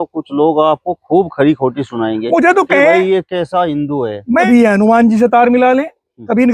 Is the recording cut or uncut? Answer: cut